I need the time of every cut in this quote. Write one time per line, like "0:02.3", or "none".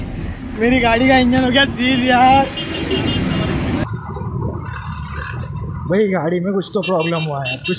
0:03.8